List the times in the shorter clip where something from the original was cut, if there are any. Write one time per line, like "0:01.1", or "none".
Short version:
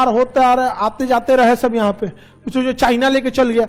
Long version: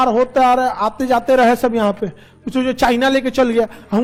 none